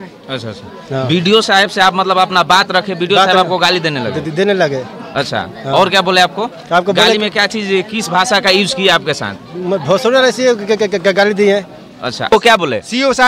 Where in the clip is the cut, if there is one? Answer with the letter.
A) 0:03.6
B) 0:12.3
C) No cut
B